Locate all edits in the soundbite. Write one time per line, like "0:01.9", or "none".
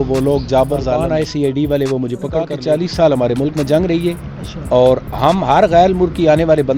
0:01.3
0:02.5